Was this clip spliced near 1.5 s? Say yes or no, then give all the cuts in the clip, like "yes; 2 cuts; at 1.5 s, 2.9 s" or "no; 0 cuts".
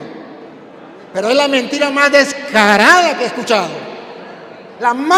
no; 0 cuts